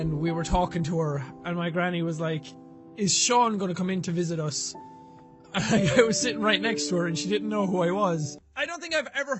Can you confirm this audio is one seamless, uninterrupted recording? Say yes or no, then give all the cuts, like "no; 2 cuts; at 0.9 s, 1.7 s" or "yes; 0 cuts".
no; 1 cut; at 8.4 s